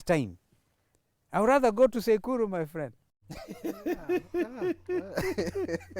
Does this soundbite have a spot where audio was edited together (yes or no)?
no